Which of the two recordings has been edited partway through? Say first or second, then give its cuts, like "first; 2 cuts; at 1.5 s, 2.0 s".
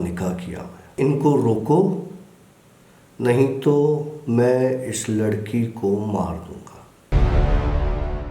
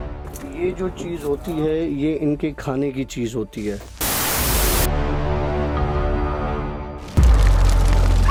first; 2 cuts; at 1.0 s, 7.1 s